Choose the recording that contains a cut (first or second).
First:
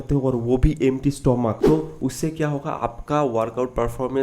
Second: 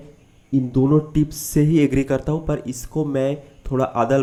first